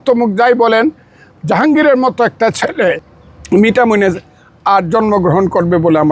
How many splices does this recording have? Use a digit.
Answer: 1